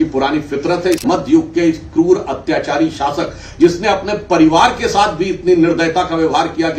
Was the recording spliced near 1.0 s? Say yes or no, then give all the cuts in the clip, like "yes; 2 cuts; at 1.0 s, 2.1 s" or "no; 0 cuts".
yes; 1 cut; at 1.0 s